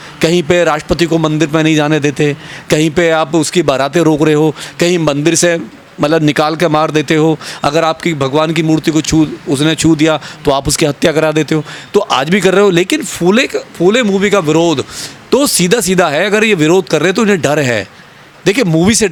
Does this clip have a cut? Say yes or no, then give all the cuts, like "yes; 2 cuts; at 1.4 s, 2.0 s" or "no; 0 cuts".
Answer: no; 0 cuts